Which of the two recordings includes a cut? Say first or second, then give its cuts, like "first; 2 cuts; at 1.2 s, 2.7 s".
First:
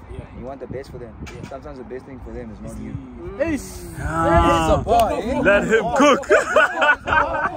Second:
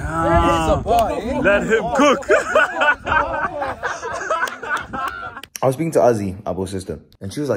second; 1 cut; at 5.4 s